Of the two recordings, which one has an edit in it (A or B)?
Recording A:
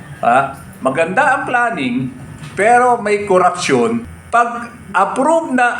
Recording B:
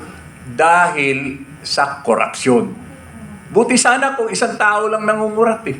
A